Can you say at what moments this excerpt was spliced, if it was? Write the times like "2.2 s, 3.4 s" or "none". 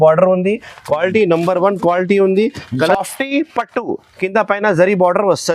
2.9 s